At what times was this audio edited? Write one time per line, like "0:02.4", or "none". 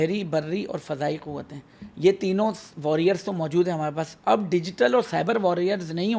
none